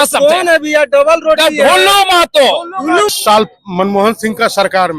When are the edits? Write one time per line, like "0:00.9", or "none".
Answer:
0:03.1